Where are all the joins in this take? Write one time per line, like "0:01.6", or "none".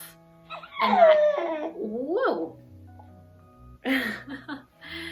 none